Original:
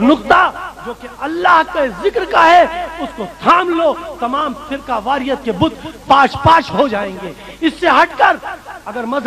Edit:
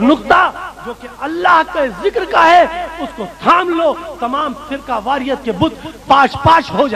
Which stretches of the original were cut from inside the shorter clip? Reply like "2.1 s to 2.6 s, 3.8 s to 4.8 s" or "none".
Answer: none